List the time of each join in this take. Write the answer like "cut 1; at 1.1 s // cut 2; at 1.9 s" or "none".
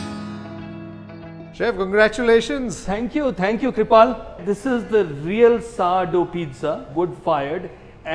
cut 1; at 1.5 s // cut 2; at 4.3 s // cut 3; at 6.8 s